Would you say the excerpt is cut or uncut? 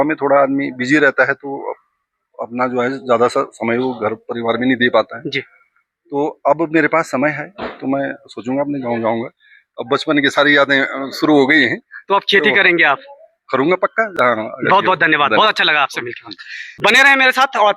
uncut